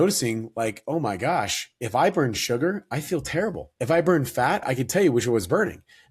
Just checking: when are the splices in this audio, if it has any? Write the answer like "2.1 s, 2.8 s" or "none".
3.7 s, 4.6 s